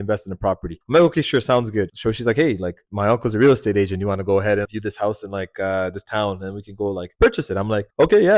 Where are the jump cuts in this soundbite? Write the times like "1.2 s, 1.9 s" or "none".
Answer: 4.7 s